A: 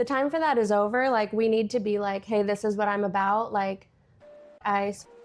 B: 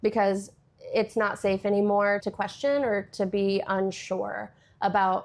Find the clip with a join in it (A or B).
B